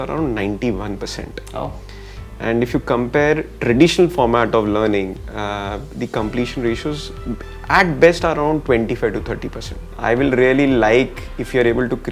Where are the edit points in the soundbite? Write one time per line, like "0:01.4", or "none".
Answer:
0:09.9